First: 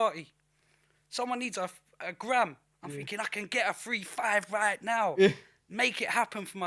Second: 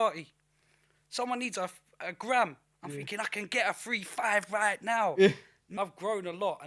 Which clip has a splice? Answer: second; 1 cut; at 5.7 s

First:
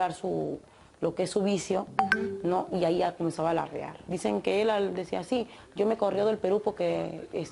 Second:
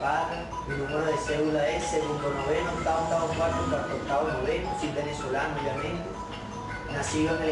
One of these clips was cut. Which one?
first; 1 cut; at 4.1 s

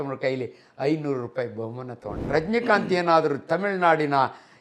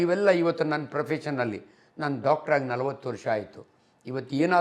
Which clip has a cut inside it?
first; 1 cut; at 2.1 s

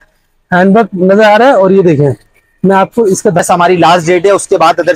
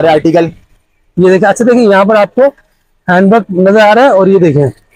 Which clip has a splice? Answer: first; 1 cut; at 3.4 s

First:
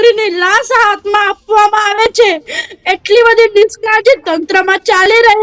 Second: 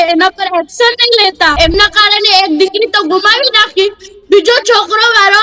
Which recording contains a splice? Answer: second; 1 cut; at 1.5 s

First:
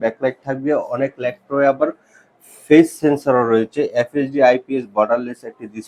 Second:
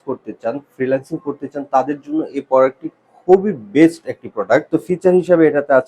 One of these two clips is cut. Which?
second; 1 cut; at 4.7 s

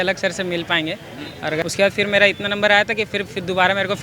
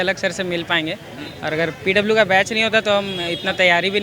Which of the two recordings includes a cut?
first; 1 cut; at 1.6 s

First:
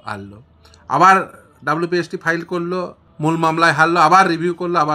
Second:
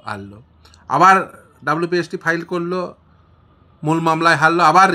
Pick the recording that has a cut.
first; 1 cut; at 3.0 s

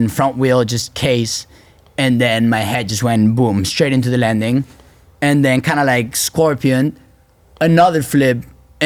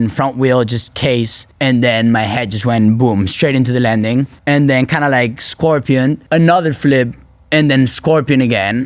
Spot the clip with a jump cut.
second; 3 cuts; at 1.4 s, 4.4 s, 6.2 s

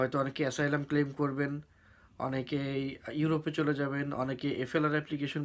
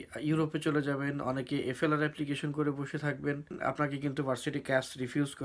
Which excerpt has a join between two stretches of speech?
second; 1 cut; at 3.6 s

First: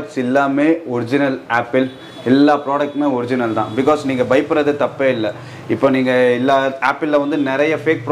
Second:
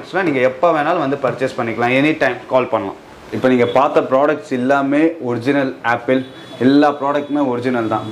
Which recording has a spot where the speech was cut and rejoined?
second; 1 cut; at 3.3 s

